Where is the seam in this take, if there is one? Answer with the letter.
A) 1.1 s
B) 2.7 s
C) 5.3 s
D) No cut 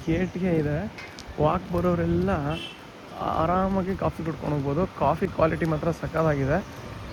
D